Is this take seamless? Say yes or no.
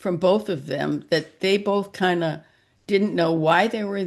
yes